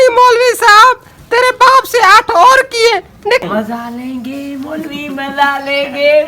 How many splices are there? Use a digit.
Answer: 1